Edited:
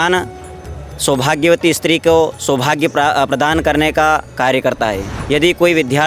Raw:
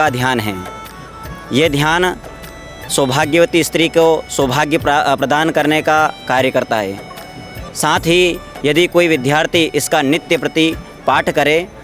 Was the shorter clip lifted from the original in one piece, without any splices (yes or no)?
no